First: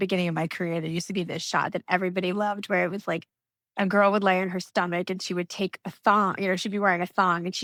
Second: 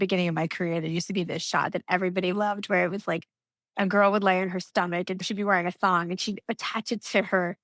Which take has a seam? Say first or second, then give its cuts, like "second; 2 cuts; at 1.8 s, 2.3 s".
second; 1 cut; at 5.3 s